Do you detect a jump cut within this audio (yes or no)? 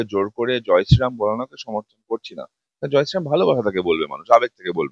no